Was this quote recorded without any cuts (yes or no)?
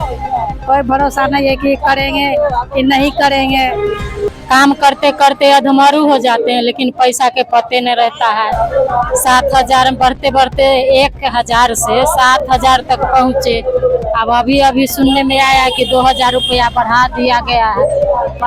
no